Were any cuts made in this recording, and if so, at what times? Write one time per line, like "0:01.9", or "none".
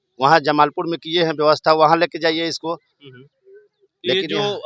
none

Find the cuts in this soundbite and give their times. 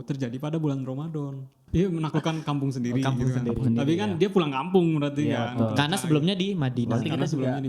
0:01.6

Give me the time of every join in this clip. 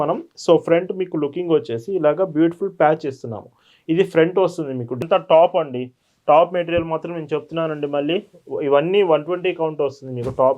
0:05.0

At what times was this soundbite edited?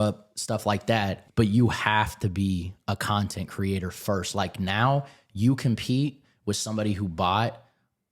0:01.2

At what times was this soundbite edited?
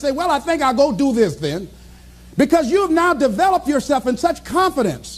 none

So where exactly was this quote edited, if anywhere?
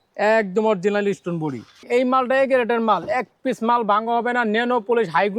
0:01.8

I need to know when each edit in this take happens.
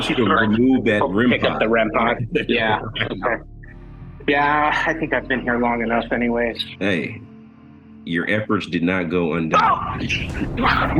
0:06.7

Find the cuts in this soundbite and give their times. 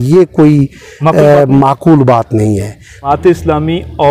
0:03.0

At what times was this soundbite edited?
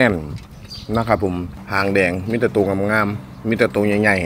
0:01.6

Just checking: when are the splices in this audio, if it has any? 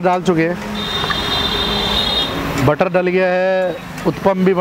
none

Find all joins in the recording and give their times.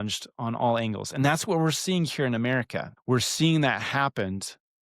0:02.9

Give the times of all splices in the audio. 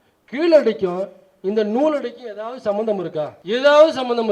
0:03.4

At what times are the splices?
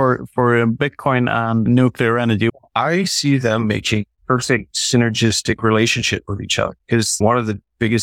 0:01.6
0:02.5
0:04.6
0:07.2

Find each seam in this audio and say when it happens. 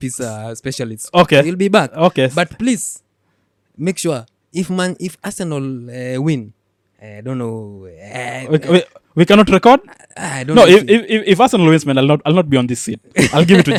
none

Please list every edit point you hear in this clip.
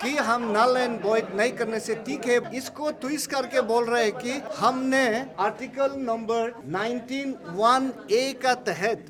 0:02.4
0:04.5
0:05.3
0:06.6

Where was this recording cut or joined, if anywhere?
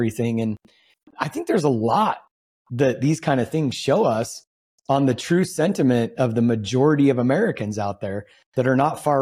0:01.1

